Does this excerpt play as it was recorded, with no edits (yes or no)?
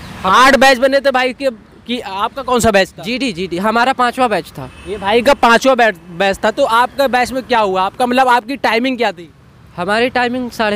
yes